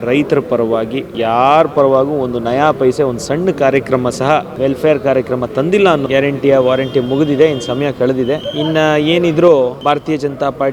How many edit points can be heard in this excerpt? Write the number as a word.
five